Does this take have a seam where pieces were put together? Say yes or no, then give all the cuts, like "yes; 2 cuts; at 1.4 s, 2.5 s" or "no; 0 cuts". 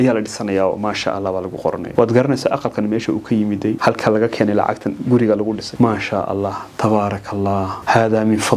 no; 0 cuts